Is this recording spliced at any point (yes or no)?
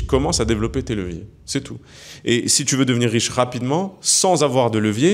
no